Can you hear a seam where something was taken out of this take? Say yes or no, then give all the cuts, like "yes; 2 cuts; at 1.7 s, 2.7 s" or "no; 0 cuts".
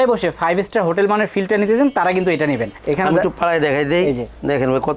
no; 0 cuts